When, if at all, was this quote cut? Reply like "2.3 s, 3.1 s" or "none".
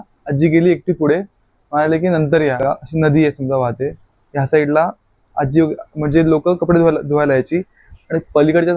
2.6 s